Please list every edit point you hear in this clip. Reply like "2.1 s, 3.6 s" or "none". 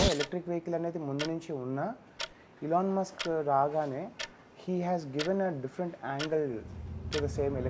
none